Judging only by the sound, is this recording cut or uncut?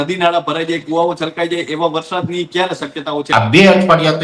cut